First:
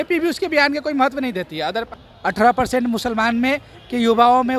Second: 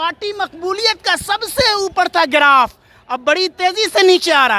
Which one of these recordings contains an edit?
first; 1 cut; at 1.9 s

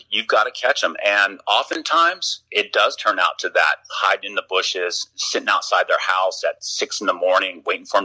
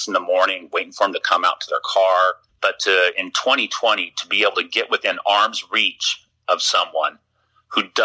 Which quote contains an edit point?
second; 1 cut; at 2.5 s

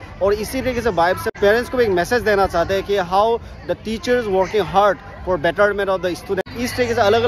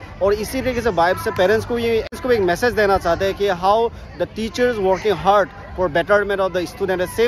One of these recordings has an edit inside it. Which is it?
first; 2 cuts; at 1.4 s, 6.4 s

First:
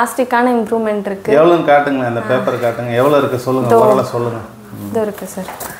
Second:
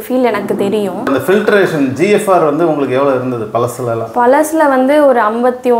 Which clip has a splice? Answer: second; 1 cut; at 1.1 s

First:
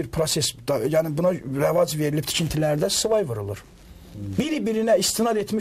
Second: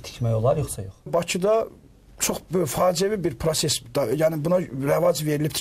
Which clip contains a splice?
second; 1 cut; at 1.1 s

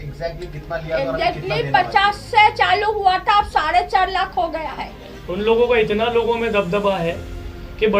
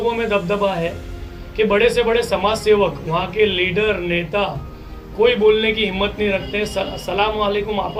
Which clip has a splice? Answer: first; 1 cut; at 5.2 s

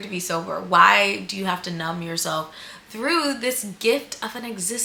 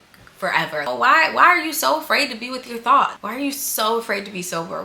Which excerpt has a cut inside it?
second; 2 cuts; at 0.9 s, 3.2 s

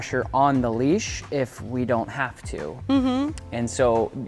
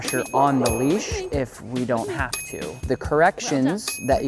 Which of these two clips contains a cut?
second; 1 cut; at 2.8 s

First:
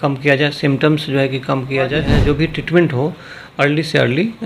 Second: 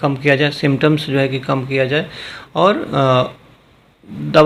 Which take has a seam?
first; 1 cut; at 2.1 s

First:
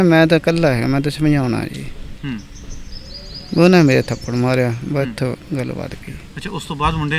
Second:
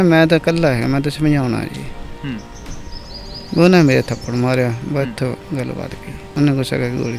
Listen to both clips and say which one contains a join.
second; 1 cut; at 6.2 s

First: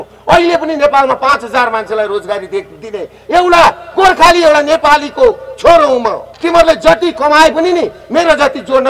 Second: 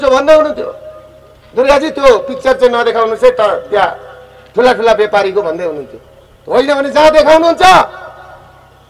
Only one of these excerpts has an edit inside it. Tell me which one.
first; 1 cut; at 6.3 s

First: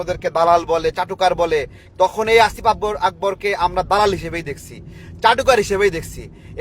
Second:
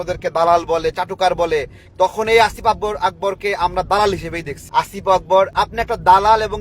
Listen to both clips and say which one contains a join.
second; 2 cuts; at 4.5 s, 5.5 s

